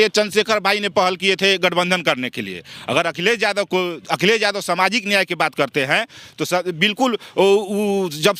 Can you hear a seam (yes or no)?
no